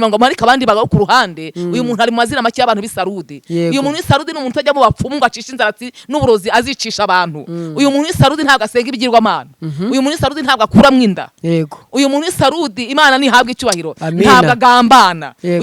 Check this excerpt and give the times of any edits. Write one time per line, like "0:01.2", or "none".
none